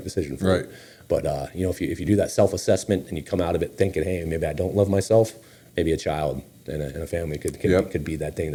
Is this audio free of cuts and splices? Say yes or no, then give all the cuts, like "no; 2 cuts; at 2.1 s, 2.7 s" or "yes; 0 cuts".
yes; 0 cuts